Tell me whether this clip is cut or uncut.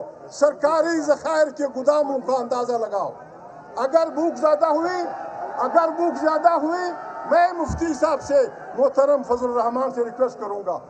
cut